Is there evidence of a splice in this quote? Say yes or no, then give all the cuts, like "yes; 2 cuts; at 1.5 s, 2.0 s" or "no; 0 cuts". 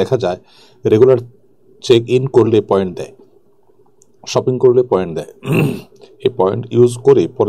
no; 0 cuts